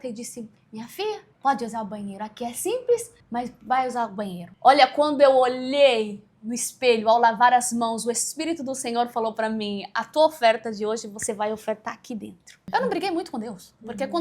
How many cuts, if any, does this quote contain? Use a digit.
4